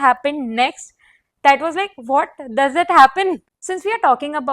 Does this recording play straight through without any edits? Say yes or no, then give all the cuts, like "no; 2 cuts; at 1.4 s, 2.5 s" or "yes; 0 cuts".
no; 1 cut; at 3.5 s